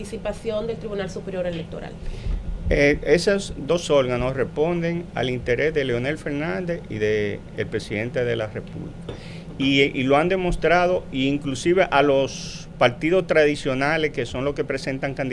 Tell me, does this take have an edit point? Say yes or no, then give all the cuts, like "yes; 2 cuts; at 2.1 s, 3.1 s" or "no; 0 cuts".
no; 0 cuts